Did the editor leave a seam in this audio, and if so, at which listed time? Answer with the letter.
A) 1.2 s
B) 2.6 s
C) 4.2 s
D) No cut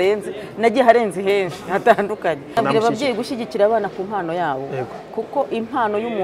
B